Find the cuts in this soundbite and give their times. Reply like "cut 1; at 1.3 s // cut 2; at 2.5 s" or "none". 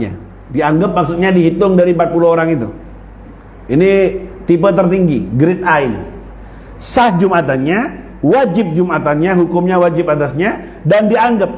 none